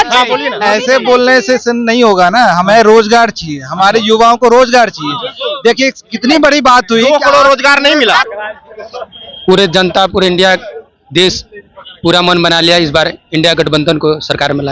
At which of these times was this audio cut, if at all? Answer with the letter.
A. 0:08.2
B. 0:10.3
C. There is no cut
A